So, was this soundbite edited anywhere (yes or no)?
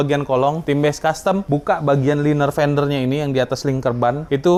no